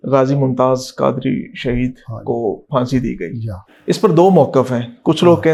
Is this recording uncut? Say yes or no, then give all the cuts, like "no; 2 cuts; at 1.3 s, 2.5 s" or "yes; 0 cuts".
yes; 0 cuts